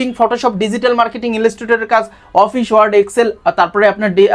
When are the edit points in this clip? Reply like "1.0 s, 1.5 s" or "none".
none